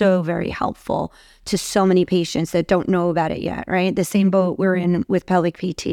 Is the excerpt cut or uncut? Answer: uncut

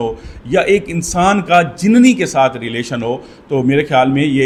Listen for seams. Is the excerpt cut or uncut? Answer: uncut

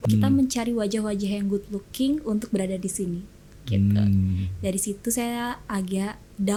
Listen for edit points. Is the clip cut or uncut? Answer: uncut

